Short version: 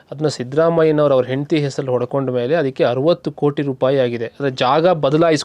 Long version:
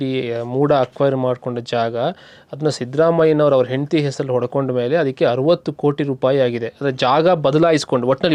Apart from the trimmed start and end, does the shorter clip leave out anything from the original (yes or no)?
no